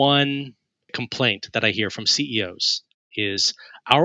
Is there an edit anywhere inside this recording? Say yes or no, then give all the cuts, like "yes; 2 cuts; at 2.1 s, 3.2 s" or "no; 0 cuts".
yes; 2 cuts; at 0.9 s, 3.2 s